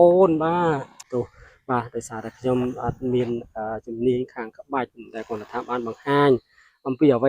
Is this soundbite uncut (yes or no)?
no